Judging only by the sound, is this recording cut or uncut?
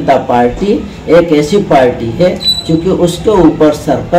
uncut